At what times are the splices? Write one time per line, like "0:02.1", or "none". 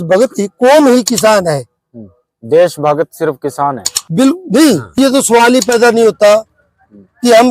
0:05.0